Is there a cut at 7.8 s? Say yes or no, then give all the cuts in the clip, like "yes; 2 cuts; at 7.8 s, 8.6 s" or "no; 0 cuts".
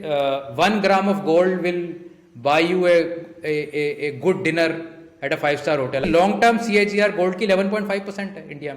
no; 1 cut; at 6.0 s